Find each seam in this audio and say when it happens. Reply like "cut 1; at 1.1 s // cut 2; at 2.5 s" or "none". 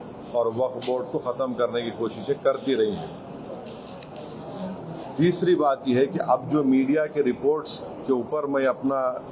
none